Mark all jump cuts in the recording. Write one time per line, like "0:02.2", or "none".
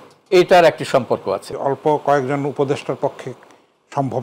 0:01.5

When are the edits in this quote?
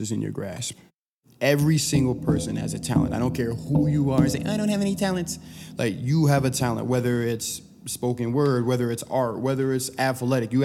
0:00.9

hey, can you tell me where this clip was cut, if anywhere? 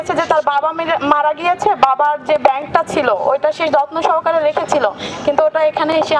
none

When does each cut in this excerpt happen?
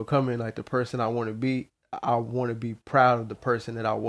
none

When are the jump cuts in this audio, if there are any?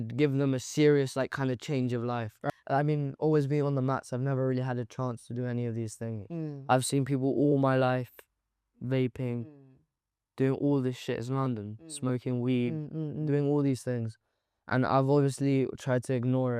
0:02.4

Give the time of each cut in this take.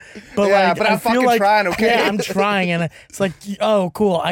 none

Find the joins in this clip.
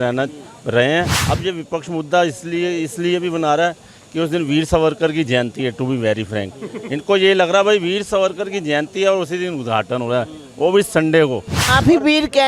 0:01.2
0:11.6

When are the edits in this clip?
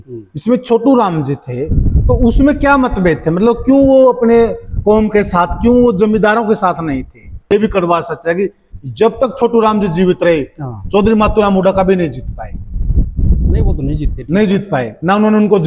0:07.5

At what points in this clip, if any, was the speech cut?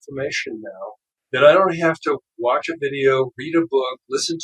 0:01.1

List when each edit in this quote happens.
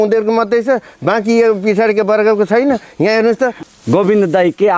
0:03.6

